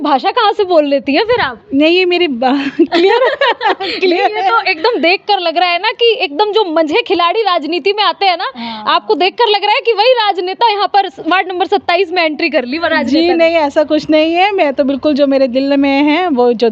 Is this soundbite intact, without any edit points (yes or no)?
yes